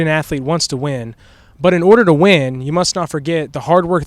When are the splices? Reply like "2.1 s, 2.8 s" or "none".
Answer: none